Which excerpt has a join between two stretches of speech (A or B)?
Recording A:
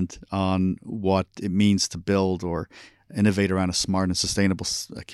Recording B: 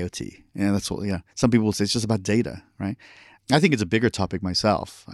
B